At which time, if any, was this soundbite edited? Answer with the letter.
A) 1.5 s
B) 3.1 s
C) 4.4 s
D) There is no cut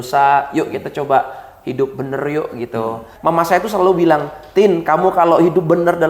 B